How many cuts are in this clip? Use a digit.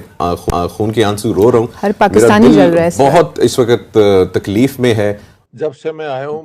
1